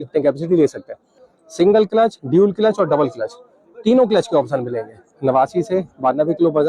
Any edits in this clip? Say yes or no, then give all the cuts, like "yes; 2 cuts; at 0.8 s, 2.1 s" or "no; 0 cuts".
yes; 2 cuts; at 1.3 s, 5.1 s